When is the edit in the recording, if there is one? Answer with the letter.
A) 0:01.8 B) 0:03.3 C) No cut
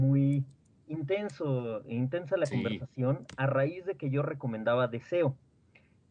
B